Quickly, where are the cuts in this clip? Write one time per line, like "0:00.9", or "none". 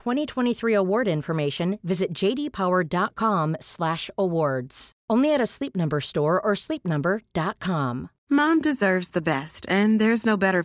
0:08.1